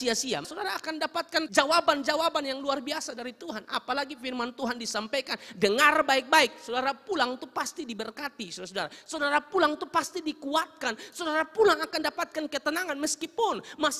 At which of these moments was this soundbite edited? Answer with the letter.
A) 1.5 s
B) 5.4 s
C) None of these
A